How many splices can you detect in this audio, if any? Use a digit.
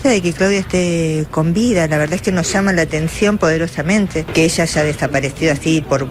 1